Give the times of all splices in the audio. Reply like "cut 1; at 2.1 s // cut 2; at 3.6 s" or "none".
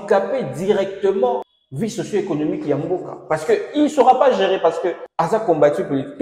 cut 1; at 1.6 s // cut 2; at 5.0 s